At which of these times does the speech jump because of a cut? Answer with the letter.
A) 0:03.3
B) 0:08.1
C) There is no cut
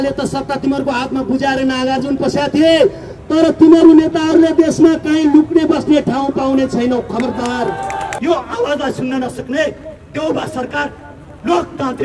B